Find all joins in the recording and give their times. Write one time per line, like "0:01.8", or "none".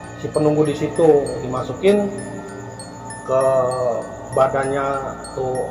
none